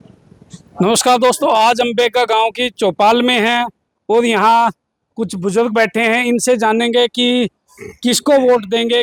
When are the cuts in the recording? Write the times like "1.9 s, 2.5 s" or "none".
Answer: none